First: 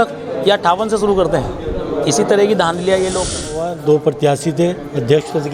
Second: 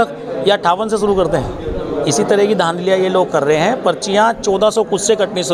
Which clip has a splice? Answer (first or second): first